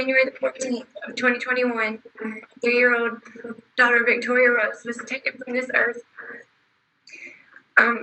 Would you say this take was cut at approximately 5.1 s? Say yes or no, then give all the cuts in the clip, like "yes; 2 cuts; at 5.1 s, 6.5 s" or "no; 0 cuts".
no; 0 cuts